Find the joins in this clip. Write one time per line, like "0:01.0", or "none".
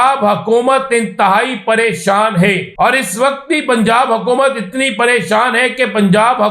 0:02.7